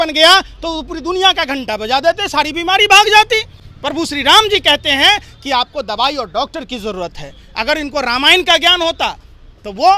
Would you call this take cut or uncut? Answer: uncut